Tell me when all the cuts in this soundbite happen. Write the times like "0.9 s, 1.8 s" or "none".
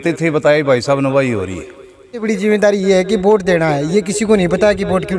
2.2 s